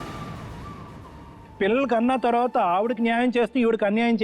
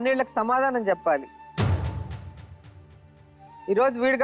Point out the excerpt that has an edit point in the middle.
first; 1 cut; at 1.4 s

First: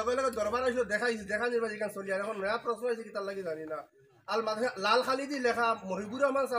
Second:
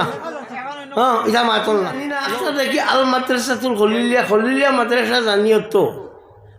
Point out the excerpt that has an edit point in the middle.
second; 1 cut; at 2.2 s

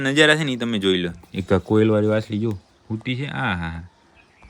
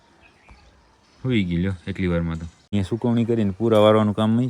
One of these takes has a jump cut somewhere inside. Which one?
second; 1 cut; at 2.7 s

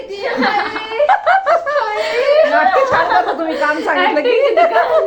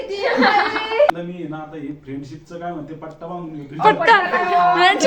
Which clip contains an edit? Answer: second; 1 cut; at 1.1 s

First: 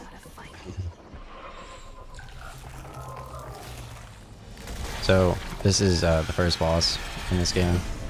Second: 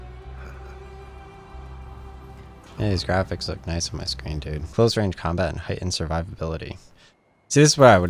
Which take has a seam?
second; 1 cut; at 4.7 s

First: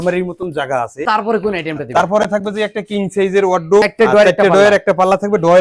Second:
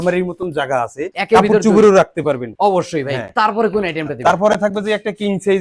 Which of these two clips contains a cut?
first; 2 cuts; at 1.0 s, 3.9 s

